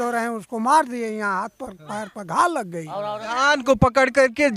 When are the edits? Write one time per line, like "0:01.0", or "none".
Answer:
0:03.2